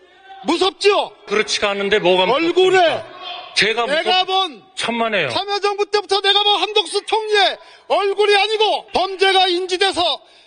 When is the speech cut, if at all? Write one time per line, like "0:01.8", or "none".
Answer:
0:01.3
0:08.8